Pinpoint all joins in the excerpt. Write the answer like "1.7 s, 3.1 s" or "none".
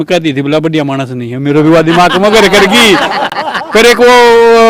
none